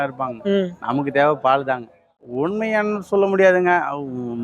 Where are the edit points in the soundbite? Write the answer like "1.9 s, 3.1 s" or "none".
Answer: 2.2 s